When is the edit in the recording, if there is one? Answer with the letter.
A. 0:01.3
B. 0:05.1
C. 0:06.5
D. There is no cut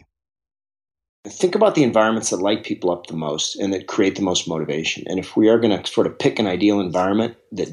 A